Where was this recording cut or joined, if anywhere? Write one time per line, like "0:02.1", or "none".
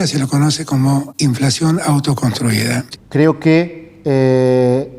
0:02.9